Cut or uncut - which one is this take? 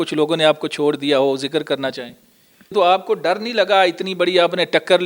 cut